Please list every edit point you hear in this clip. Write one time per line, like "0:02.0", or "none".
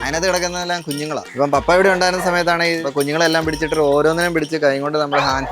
0:01.3
0:02.8

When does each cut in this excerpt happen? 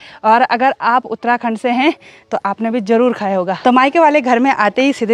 0:03.6

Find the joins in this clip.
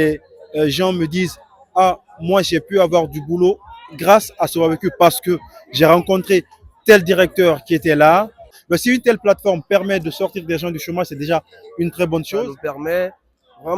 0:08.4
0:12.5

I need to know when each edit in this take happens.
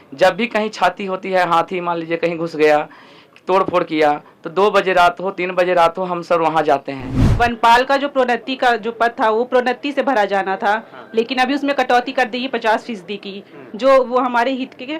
0:07.2

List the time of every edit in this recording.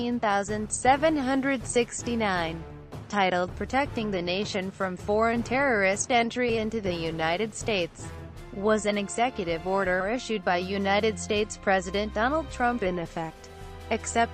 0:01.0

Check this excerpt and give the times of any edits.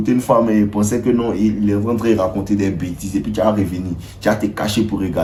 none

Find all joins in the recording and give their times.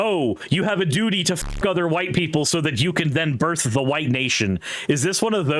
none

